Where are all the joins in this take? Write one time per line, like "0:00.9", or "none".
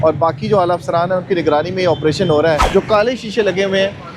0:02.6

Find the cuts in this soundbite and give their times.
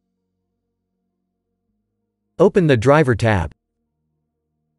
0:02.3
0:03.5

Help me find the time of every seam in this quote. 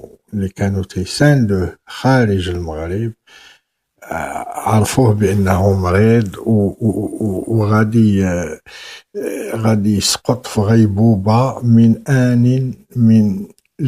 0:02.5

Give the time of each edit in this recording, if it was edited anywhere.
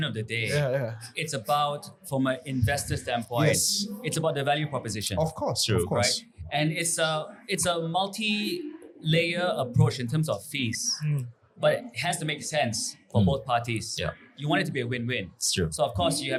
none

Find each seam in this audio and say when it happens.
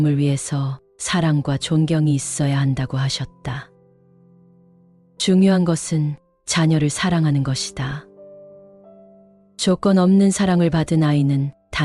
0:08.1
0:09.6

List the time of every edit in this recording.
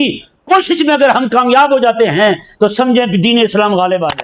none

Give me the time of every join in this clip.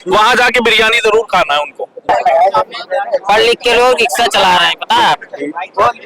0:02.1

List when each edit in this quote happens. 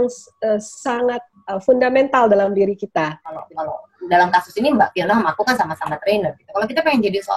0:03.5

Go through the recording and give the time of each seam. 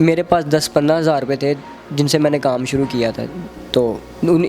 none

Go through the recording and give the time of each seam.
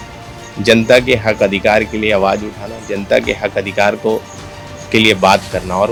none

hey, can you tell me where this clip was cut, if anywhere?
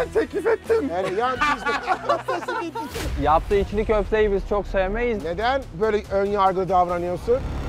0:03.1

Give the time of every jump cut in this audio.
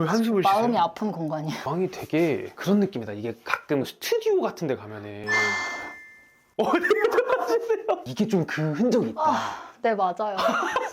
0:01.6
0:08.1

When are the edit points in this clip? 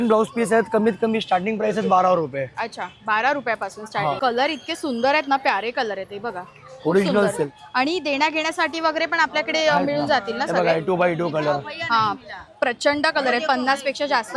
0:04.2
0:07.3

